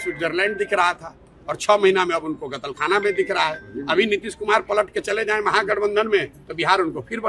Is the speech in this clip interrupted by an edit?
no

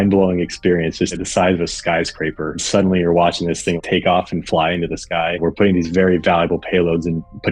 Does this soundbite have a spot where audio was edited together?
yes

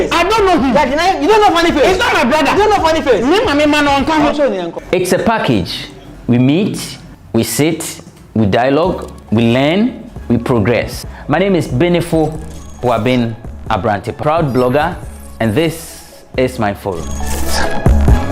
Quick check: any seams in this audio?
yes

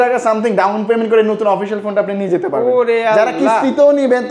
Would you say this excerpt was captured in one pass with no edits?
yes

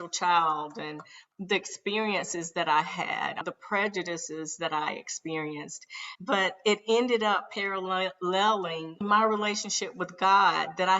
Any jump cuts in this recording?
yes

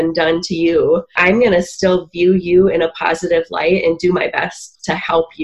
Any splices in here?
yes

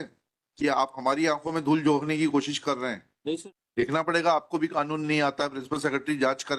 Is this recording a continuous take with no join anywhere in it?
no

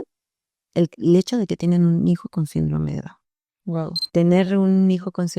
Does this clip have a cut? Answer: yes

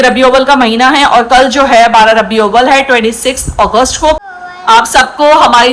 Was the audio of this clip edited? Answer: yes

